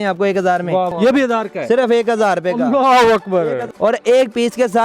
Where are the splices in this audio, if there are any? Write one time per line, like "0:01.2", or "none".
0:00.9
0:03.7